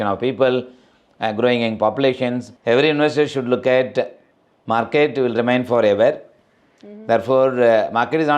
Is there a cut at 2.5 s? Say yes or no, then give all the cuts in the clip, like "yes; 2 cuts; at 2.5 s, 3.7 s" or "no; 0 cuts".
yes; 1 cut; at 2.5 s